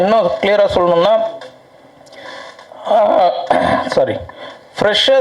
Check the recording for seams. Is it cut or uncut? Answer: uncut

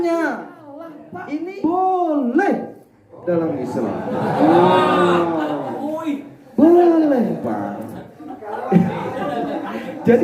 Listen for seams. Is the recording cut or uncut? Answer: cut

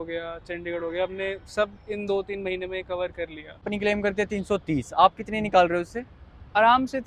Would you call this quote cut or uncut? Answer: cut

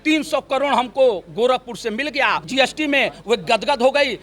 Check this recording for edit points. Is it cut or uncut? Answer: cut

